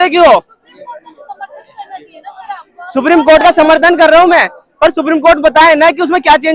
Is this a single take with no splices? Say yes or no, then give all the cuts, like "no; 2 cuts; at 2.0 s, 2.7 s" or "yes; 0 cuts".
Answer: yes; 0 cuts